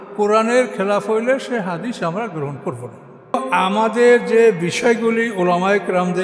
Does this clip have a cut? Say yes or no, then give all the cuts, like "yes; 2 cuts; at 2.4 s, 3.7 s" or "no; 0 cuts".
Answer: yes; 1 cut; at 3.4 s